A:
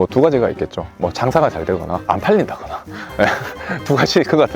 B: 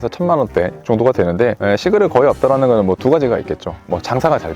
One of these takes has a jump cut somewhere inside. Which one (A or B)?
B